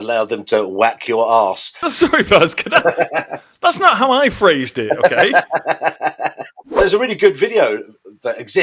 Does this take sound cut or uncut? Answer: cut